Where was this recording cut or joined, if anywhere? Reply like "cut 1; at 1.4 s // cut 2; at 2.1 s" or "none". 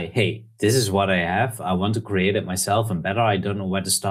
none